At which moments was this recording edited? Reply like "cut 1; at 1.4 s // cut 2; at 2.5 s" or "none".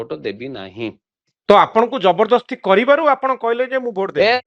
none